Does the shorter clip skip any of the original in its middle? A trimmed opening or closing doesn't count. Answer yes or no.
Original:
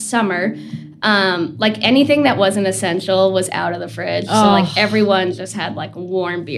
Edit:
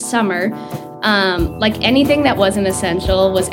no